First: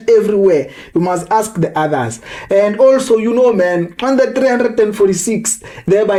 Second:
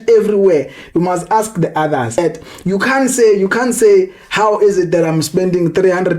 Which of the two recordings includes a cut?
second; 1 cut; at 2.1 s

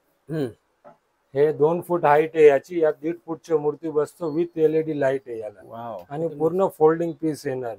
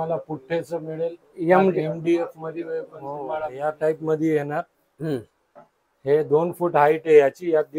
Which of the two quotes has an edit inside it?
second; 1 cut; at 3.5 s

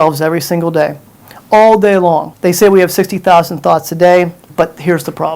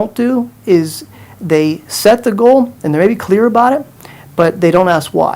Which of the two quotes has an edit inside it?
first; 2 cuts; at 2.3 s, 4.4 s

